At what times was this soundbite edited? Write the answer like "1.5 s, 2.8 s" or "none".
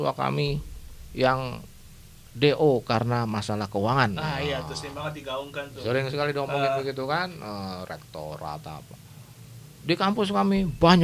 none